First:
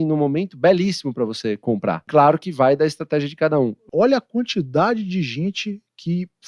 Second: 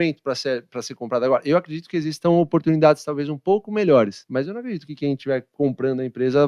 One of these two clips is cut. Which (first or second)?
first